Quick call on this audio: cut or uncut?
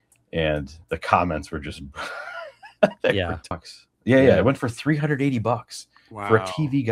cut